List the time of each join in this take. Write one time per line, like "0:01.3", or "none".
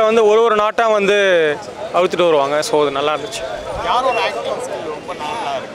none